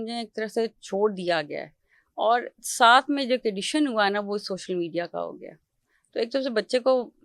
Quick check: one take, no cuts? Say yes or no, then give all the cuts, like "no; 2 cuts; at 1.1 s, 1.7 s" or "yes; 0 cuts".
yes; 0 cuts